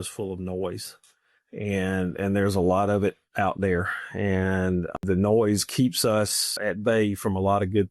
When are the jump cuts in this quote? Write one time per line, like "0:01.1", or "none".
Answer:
0:05.0
0:06.6